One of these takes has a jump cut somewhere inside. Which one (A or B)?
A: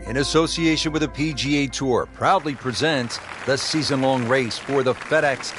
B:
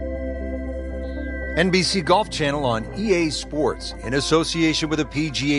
B